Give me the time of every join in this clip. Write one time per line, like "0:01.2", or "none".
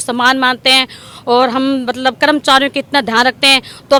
none

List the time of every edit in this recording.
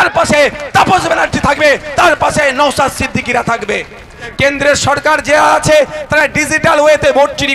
0:04.2

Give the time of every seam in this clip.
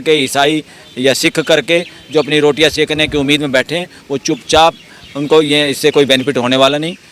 none

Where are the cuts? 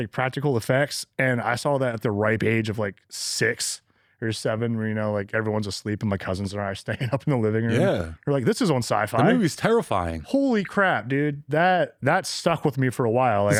none

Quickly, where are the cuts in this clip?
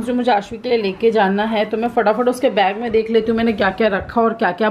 none

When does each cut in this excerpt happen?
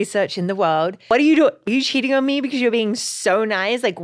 0:01.0
0:01.6

